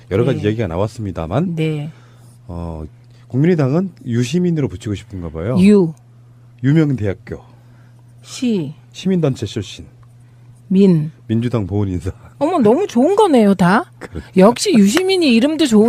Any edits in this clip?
no; 0 cuts

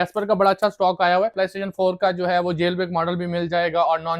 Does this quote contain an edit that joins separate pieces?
yes; 1 cut; at 1.3 s

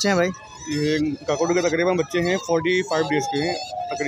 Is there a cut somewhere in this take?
no; 0 cuts

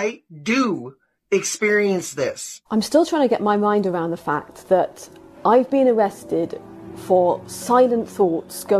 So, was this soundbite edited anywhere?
yes; 1 cut; at 2.6 s

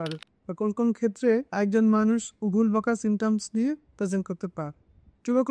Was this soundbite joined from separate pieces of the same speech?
no; 0 cuts

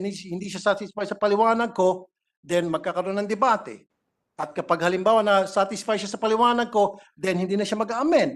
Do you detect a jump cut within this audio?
no; 0 cuts

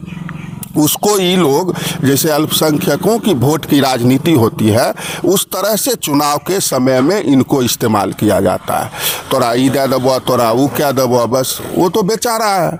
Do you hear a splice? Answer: no; 0 cuts

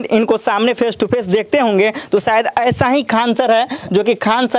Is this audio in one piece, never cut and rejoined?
yes; 0 cuts

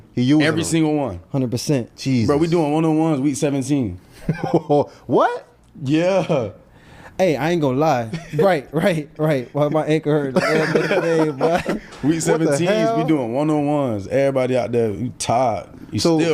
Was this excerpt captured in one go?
yes; 0 cuts

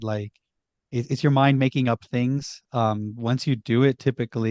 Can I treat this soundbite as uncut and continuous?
yes; 0 cuts

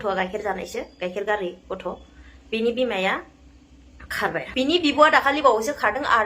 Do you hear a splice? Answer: yes; 1 cut; at 4.4 s

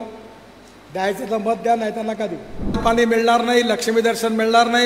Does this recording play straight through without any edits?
no; 1 cut; at 2.8 s

